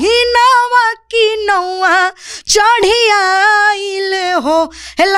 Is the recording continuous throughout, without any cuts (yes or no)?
yes